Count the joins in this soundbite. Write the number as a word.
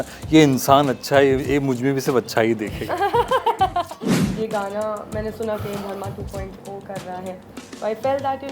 one